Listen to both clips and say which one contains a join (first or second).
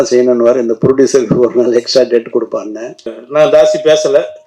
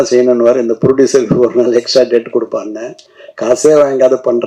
first